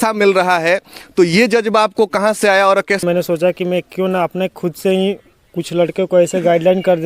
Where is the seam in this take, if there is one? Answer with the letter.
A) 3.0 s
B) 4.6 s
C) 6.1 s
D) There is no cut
A